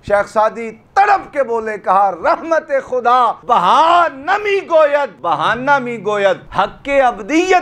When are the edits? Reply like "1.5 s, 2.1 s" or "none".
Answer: 3.4 s, 5.1 s, 6.5 s